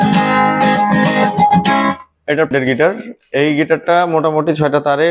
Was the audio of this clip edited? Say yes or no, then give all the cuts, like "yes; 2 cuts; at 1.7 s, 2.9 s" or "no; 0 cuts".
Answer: yes; 1 cut; at 2.5 s